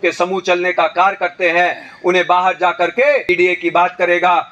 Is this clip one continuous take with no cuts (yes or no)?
no